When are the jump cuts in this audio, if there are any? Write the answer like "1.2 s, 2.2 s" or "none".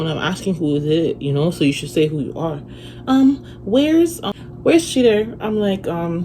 4.3 s